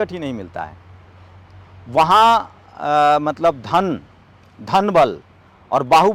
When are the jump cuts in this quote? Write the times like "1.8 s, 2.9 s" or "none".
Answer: none